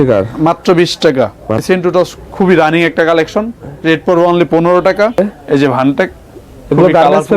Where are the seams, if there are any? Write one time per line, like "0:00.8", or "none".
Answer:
0:01.6
0:05.2